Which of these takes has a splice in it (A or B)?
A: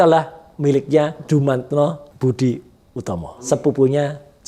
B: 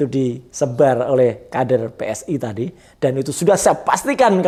A